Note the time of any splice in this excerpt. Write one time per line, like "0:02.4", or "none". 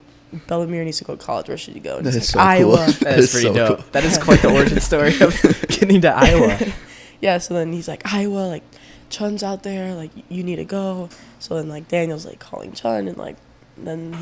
none